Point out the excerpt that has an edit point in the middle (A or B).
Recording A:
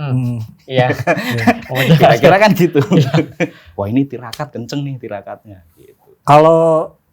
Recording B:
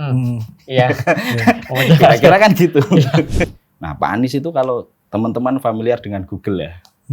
B